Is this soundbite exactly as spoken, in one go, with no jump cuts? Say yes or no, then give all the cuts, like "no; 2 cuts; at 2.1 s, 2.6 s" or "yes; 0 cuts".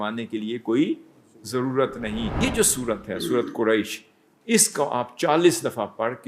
no; 1 cut; at 2.3 s